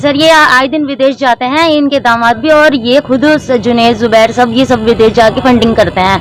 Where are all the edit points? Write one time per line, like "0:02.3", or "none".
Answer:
none

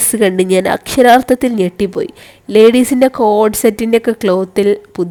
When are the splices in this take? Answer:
none

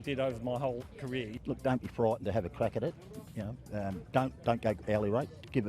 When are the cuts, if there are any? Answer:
0:01.3

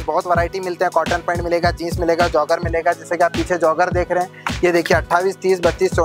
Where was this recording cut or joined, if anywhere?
none

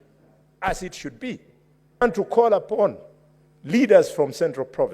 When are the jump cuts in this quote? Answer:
0:02.0

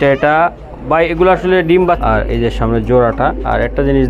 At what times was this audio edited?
0:02.0

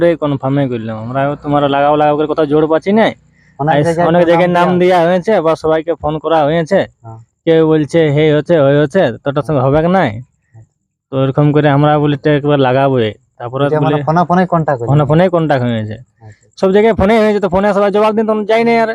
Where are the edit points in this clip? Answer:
none

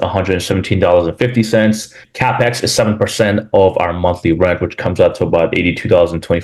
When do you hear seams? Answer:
none

